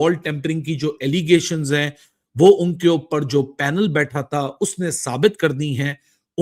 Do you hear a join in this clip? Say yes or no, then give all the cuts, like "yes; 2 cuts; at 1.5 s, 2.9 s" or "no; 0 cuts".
no; 0 cuts